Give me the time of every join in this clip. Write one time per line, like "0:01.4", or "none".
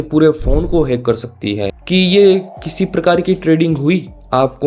0:01.7